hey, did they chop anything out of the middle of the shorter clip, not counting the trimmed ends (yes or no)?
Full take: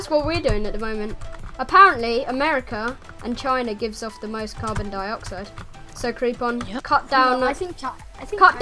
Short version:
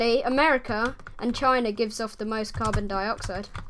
no